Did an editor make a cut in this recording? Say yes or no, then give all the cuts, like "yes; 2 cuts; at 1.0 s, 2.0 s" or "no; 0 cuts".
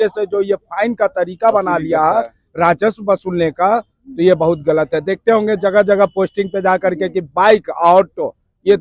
no; 0 cuts